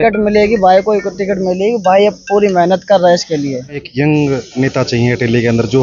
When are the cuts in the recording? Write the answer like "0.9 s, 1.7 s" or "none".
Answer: 3.8 s